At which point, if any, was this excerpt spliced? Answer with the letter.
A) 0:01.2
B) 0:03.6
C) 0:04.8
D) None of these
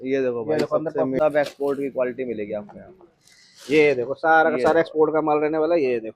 A